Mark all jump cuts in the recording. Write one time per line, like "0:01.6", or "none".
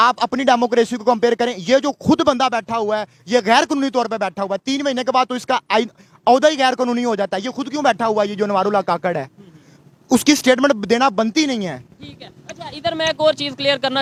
none